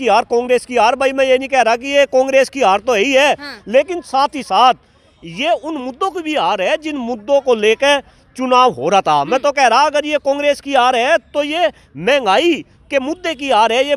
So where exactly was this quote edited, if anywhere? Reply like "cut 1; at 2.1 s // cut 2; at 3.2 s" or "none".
none